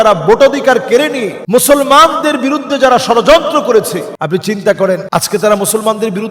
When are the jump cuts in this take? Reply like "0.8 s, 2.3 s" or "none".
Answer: 1.3 s, 4.1 s, 5.0 s

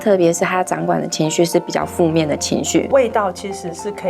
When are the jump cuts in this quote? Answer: 2.9 s

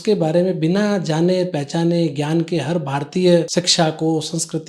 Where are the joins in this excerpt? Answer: 3.5 s

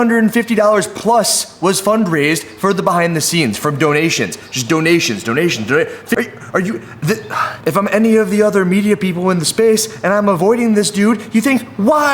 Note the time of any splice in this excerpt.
6.2 s, 7.5 s

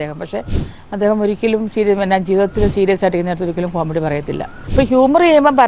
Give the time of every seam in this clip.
4.6 s

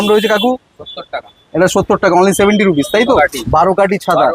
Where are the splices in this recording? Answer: 3.0 s

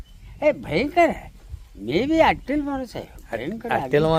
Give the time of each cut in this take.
none

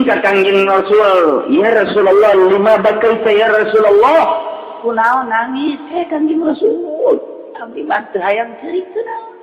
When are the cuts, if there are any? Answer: none

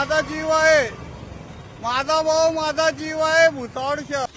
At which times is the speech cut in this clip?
none

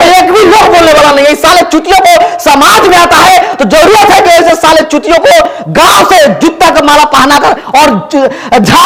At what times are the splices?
none

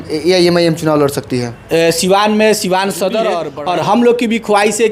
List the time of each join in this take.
3.5 s

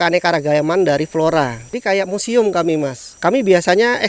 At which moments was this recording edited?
1.7 s, 3.0 s

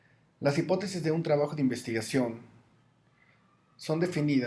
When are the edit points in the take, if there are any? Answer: 2.4 s

